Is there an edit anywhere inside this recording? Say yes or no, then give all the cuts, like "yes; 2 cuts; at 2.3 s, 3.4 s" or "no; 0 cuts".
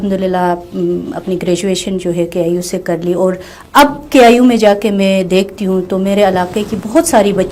no; 0 cuts